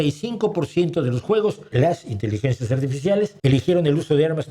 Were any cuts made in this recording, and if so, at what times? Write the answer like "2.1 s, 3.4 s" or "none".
1.7 s, 3.3 s